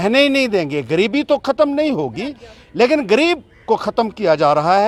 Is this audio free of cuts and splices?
yes; 0 cuts

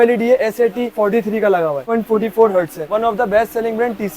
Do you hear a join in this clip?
yes; 2 cuts; at 1.9 s, 2.8 s

